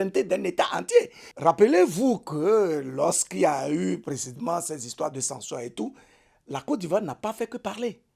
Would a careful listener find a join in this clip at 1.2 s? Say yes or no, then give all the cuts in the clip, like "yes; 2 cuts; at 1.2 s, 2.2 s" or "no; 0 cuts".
yes; 1 cut; at 1.2 s